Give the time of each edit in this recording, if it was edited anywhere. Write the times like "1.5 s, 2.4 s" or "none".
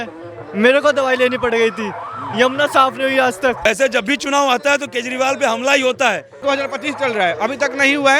3.6 s, 6.4 s